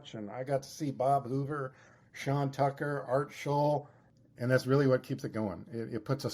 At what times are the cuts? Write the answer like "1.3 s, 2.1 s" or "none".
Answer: 4.0 s